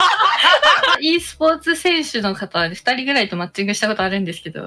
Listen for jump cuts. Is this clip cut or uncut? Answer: cut